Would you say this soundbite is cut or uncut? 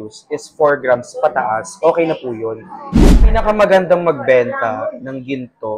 cut